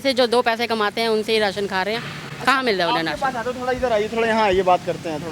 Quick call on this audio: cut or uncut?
uncut